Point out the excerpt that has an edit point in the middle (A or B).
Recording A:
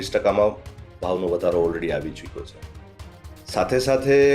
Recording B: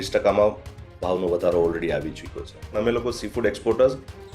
B